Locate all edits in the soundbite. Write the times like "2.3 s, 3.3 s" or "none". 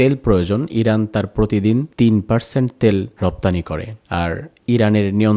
none

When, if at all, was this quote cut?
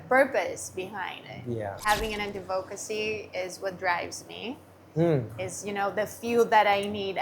1.8 s

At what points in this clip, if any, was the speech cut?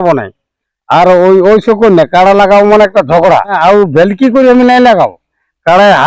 3.6 s

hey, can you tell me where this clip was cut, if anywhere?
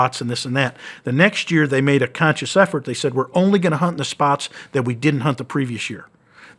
none

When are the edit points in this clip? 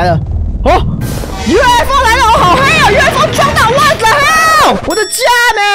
4.8 s

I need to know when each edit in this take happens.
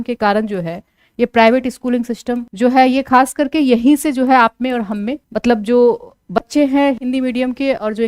none

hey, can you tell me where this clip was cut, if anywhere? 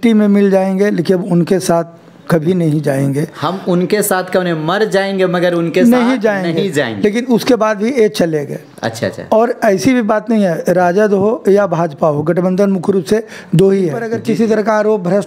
14.1 s

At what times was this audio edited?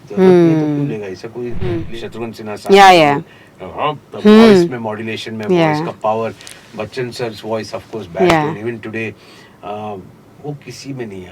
1.9 s

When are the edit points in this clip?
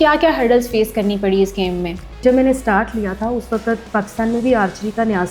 2.2 s

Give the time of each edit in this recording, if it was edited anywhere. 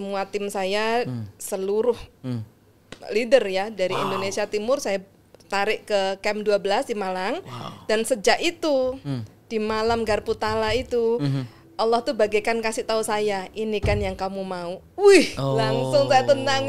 none

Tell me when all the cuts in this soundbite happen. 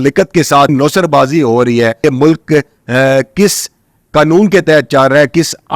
0.7 s, 2.0 s

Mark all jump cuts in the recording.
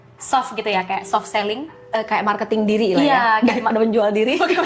none

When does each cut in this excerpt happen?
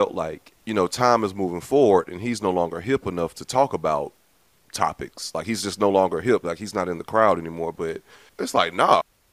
none

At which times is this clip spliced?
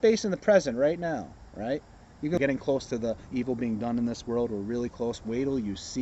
2.4 s

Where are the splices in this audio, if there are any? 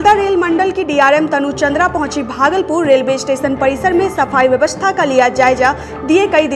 none

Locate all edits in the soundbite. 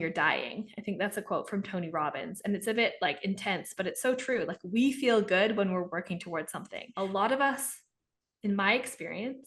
6.8 s

